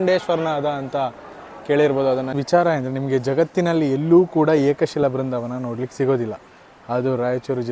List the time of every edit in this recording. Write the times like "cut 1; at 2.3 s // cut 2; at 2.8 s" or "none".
cut 1; at 2.3 s